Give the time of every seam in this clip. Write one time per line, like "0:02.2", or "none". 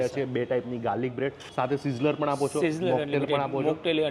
0:01.4